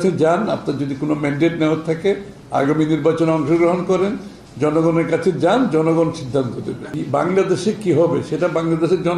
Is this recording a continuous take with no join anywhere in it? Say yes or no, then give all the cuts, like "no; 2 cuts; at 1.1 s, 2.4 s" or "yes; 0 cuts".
no; 1 cut; at 6.9 s